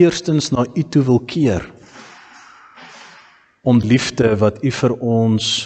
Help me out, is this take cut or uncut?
cut